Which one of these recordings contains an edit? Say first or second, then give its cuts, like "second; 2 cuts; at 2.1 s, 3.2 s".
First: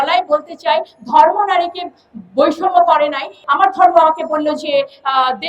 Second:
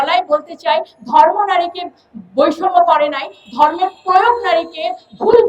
first; 1 cut; at 3.4 s